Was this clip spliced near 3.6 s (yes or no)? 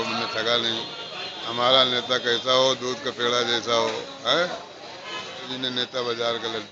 no